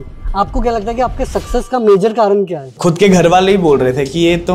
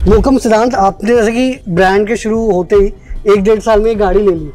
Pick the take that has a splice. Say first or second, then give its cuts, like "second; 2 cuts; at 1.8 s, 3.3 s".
first; 1 cut; at 2.6 s